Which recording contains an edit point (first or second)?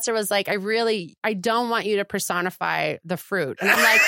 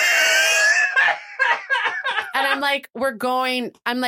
first